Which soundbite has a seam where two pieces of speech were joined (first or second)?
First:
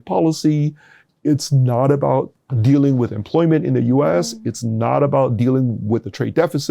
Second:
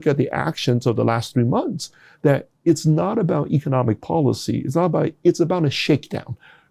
first